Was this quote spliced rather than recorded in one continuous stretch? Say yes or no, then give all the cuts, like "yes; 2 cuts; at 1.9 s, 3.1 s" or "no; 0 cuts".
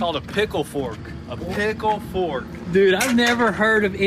no; 0 cuts